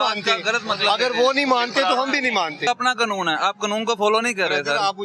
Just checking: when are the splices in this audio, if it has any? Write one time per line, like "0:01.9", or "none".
0:02.7